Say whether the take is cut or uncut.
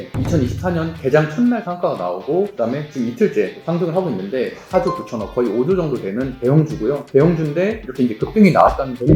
cut